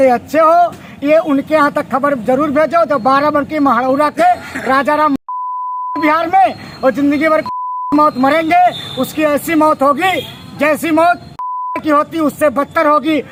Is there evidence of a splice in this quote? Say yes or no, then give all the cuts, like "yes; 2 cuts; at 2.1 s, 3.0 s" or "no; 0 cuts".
no; 0 cuts